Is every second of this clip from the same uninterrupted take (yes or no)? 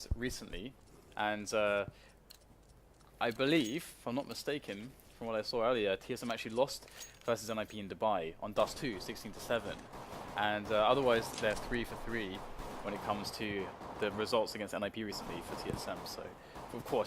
no